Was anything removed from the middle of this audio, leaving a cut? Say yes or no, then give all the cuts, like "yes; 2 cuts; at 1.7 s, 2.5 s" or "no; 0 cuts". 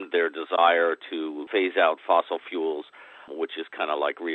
yes; 2 cuts; at 1.5 s, 3.2 s